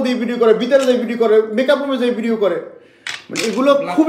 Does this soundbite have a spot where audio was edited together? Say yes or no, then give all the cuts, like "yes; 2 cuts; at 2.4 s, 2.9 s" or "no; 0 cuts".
no; 0 cuts